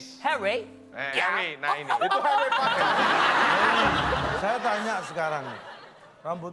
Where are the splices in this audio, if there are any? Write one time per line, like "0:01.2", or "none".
0:04.4